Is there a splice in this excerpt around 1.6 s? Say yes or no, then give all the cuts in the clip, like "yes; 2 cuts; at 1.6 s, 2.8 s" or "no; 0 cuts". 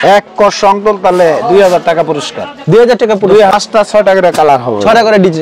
no; 1 cut; at 3.1 s